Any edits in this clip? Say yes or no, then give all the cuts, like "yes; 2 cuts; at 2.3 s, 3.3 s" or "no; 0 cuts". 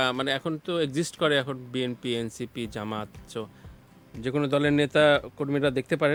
no; 0 cuts